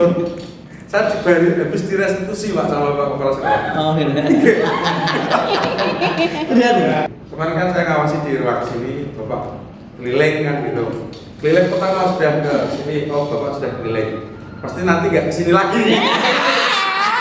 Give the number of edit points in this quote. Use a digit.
1